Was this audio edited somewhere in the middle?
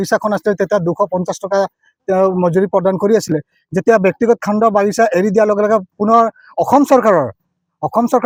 no; 0 cuts

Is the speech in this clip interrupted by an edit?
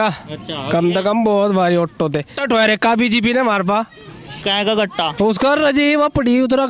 yes; 1 cut; at 2.3 s

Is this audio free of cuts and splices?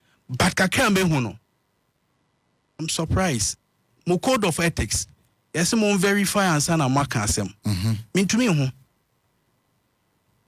yes; 0 cuts

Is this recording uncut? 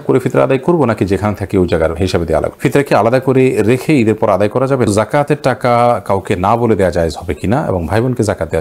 no; 2 cuts; at 2.5 s, 4.9 s

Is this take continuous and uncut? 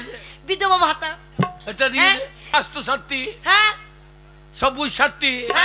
no; 1 cut; at 2.4 s

